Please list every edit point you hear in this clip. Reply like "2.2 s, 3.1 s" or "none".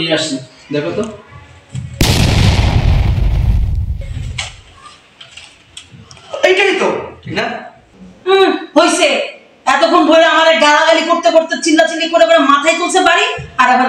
7.2 s